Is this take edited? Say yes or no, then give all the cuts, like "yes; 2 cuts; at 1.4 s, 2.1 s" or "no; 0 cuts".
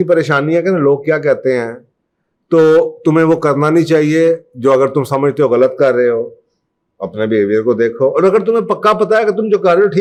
no; 0 cuts